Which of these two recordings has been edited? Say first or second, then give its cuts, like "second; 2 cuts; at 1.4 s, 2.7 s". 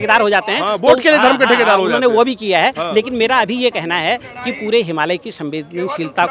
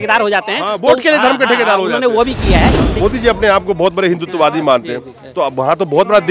second; 1 cut; at 2.8 s